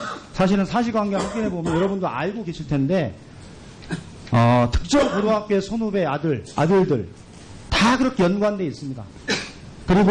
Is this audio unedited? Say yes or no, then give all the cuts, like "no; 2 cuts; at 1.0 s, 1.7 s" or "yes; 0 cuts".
no; 1 cut; at 8.0 s